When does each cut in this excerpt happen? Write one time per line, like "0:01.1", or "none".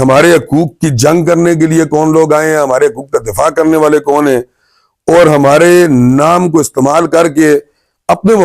none